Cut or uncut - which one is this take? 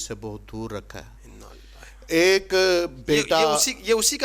uncut